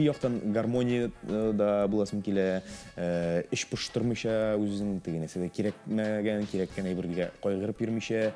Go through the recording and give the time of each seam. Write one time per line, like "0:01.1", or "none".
none